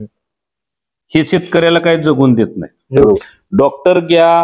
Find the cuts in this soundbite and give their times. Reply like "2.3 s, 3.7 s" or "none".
3.0 s